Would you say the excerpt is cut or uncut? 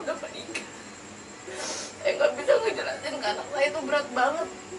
cut